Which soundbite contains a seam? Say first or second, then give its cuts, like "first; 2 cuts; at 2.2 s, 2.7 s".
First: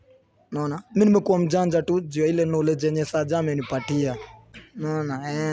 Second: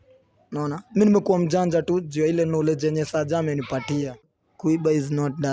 second; 1 cut; at 4.4 s